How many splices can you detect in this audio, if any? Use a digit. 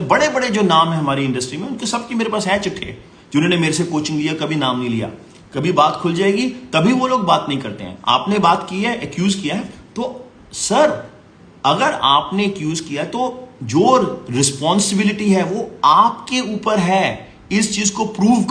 0